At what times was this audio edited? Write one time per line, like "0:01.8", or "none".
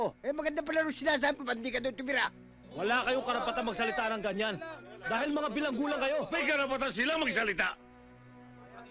0:06.3